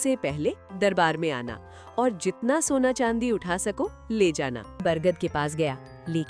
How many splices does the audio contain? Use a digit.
1